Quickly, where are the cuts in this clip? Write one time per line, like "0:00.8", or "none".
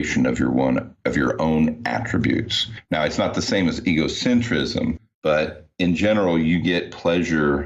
0:05.6

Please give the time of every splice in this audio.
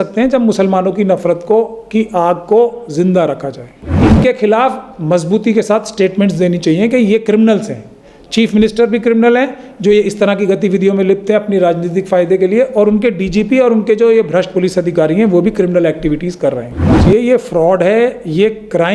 0:04.0
0:16.9

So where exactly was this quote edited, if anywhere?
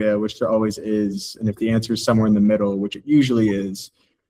none

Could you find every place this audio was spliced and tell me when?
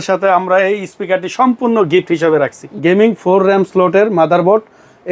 0:02.6

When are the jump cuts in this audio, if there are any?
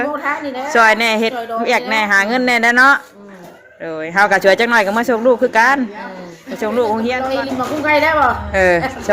0:07.2

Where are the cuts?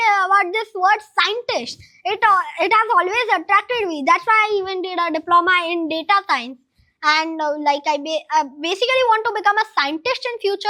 none

